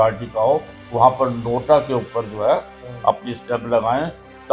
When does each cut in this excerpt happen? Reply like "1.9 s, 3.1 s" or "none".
none